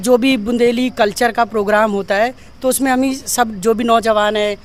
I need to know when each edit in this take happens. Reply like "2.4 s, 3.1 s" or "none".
none